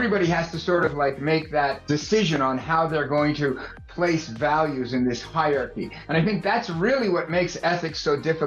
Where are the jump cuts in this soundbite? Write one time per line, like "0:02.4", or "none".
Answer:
0:01.8